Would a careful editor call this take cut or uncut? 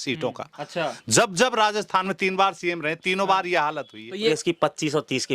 cut